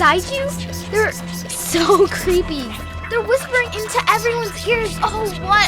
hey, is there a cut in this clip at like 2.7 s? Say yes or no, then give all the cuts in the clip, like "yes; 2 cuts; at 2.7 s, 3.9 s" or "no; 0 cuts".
yes; 1 cut; at 2.7 s